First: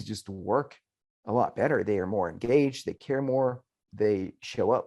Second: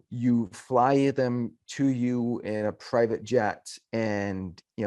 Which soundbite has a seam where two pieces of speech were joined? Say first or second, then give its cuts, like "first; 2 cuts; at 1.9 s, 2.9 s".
first; 1 cut; at 3.9 s